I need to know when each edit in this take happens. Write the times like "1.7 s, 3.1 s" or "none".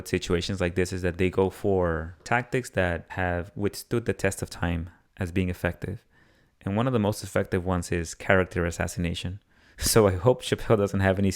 2.2 s, 3.1 s

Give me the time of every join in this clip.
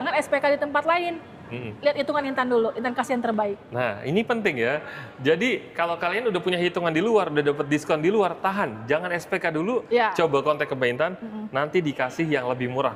none

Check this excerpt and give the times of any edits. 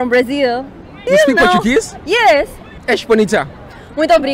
1.0 s, 2.7 s

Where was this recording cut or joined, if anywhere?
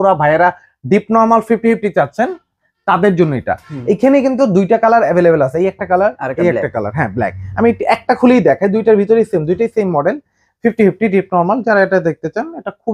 none

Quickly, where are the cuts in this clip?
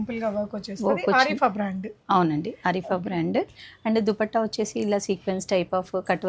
none

